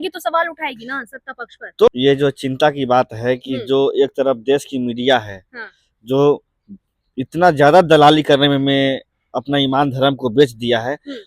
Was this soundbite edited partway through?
yes; 1 cut; at 1.9 s

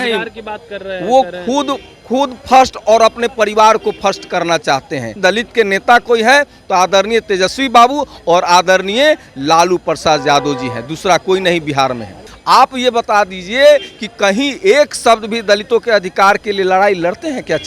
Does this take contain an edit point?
yes; 2 cuts; at 5.2 s, 12.3 s

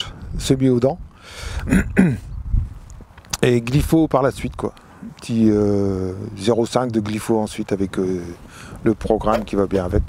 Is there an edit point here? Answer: no; 0 cuts

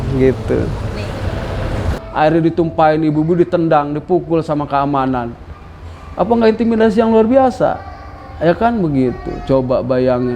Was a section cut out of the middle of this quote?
yes; 1 cut; at 2.0 s

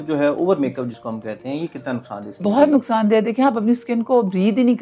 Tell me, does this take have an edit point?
no; 0 cuts

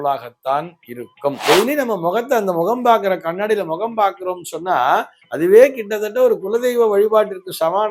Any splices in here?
yes; 1 cut; at 1.4 s

